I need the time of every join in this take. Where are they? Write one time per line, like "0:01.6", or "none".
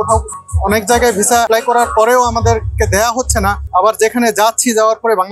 0:01.5
0:03.6

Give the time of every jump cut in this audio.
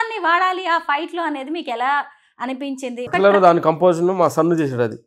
0:03.0

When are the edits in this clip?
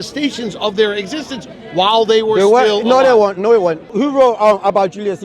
0:03.9

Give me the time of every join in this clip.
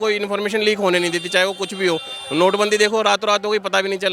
none

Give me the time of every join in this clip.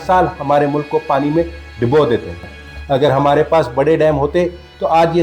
0:02.4

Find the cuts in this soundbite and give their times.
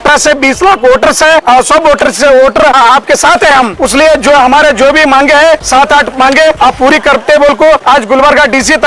0:01.4
0:02.8
0:03.7
0:05.6
0:06.6
0:07.8

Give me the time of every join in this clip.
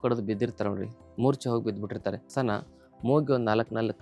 0:02.3

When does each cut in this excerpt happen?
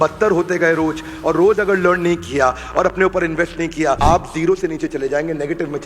0:04.0

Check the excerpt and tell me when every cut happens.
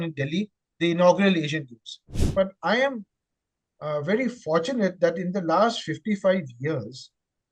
0:02.2

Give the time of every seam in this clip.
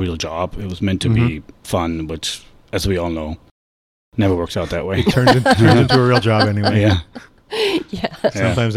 none

